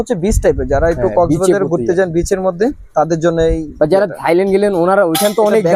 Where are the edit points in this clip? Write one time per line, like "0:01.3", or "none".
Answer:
none